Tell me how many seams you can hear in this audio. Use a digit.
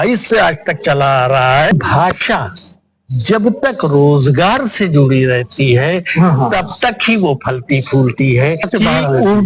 2